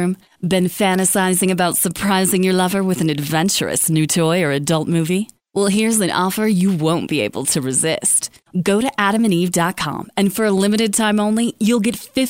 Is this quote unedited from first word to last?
yes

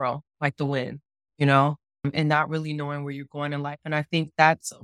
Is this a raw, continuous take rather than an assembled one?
no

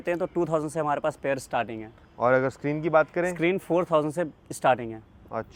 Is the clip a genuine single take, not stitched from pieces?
yes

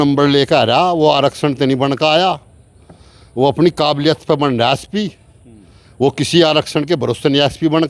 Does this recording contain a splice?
no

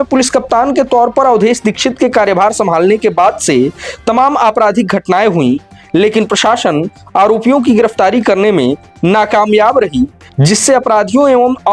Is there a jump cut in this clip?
no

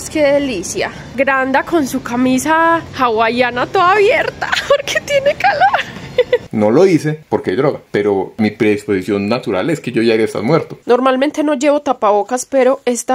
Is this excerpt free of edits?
no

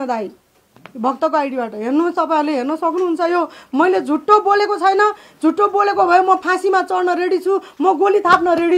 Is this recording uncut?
yes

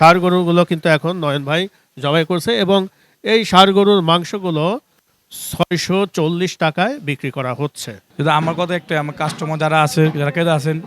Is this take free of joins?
no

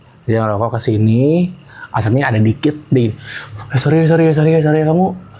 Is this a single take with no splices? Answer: yes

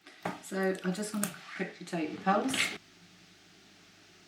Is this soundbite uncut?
no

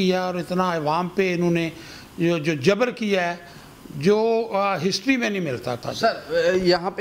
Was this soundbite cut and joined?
no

